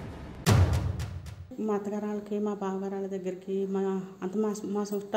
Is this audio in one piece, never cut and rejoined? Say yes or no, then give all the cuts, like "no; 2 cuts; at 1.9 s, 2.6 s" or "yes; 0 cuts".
no; 1 cut; at 1.5 s